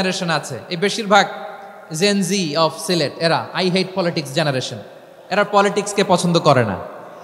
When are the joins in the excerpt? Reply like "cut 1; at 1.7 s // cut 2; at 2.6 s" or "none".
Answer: none